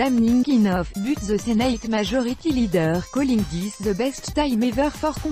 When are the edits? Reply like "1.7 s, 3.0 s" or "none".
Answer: none

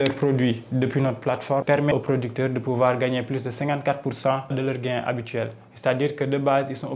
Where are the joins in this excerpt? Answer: 1.9 s, 4.5 s

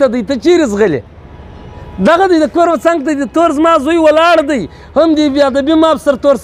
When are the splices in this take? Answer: none

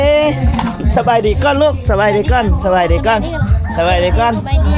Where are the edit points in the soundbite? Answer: none

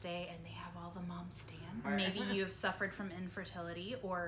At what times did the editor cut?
1.8 s

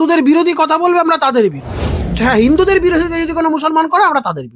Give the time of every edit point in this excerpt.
2.2 s

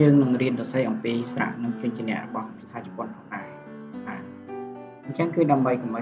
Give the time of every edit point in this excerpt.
none

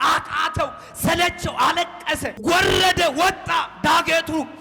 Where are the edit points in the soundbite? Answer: 2.3 s

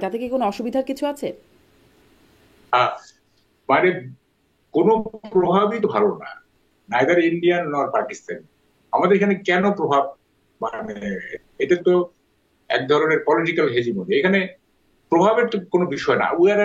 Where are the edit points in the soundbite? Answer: none

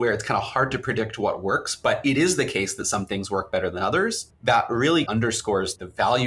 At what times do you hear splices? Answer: 4.3 s, 5.3 s

